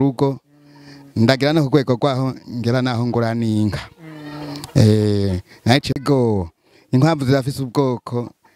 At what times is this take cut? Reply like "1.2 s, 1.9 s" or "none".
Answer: 6.0 s